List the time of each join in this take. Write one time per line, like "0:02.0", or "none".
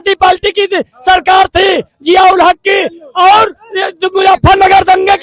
none